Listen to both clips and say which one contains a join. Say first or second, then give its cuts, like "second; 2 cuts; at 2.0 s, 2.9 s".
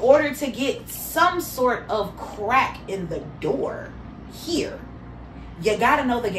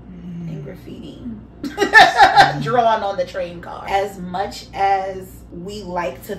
second; 3 cuts; at 1.5 s, 3.7 s, 5.4 s